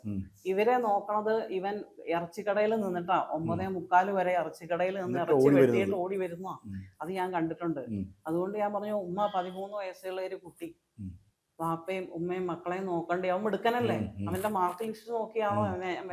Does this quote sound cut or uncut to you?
uncut